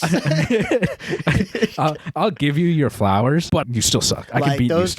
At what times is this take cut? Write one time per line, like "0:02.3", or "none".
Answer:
0:03.7